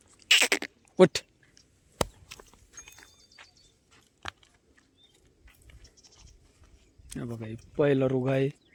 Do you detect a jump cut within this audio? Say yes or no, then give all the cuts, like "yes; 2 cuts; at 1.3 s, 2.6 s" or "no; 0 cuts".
no; 0 cuts